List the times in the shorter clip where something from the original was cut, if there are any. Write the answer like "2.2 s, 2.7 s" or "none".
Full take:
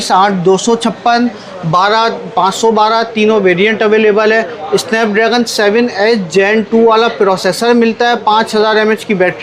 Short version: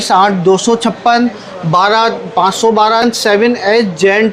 3.0 s